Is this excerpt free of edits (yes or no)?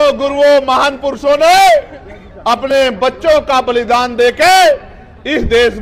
yes